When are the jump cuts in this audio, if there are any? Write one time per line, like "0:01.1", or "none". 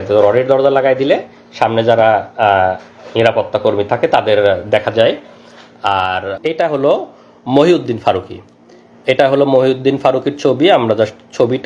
0:06.3